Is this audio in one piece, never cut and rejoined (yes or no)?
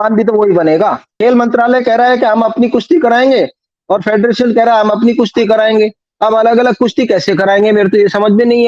no